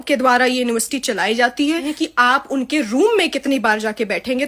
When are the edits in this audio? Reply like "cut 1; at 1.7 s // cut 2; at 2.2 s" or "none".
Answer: cut 1; at 1.9 s